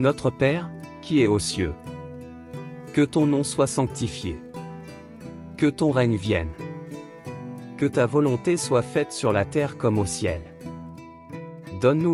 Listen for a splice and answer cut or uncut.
uncut